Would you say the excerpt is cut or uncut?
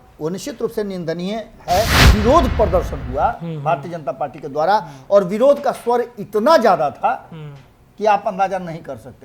cut